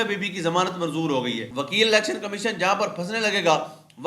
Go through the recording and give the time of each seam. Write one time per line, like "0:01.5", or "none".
0:01.5

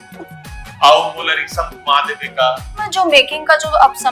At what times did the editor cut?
0:02.9

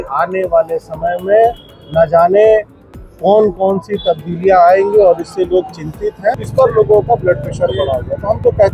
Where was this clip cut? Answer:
0:06.4

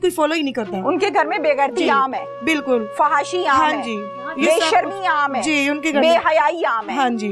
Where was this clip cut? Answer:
none

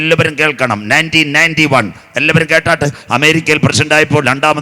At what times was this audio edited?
0:03.0

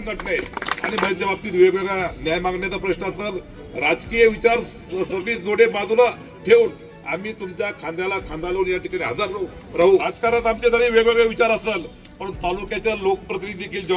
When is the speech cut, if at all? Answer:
0:01.1
0:10.0

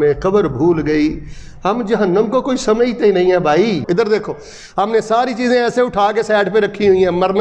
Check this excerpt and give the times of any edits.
0:03.8

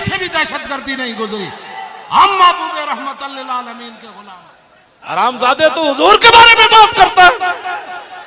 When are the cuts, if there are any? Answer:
0:04.1

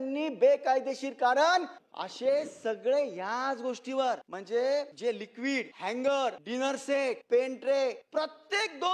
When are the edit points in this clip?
0:01.8
0:04.3
0:05.3
0:06.8
0:08.0

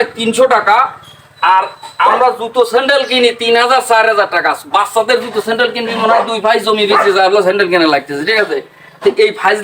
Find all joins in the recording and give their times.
none

